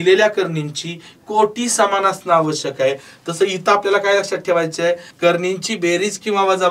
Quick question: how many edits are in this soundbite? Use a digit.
1